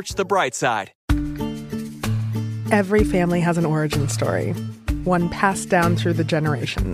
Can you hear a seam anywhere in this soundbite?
yes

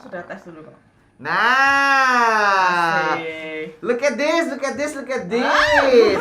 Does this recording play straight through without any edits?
yes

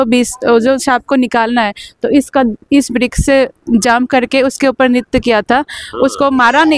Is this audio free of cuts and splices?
yes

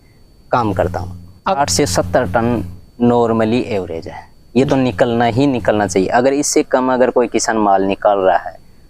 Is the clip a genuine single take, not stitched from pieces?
no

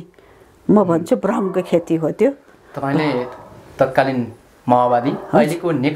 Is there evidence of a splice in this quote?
no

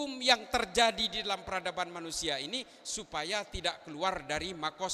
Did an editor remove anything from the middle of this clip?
no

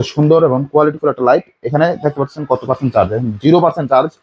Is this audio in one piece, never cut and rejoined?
yes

